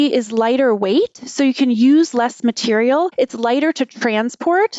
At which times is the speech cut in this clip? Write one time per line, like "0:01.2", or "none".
0:03.1